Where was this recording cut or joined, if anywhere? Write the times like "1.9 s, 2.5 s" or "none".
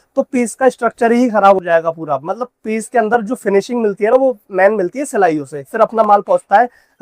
6.0 s